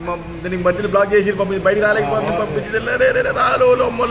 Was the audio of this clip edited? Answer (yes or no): no